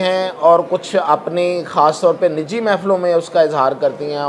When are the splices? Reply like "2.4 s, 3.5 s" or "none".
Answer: none